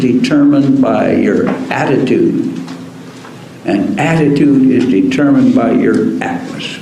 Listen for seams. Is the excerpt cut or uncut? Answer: uncut